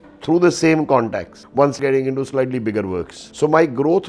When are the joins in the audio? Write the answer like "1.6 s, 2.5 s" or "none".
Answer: 3.2 s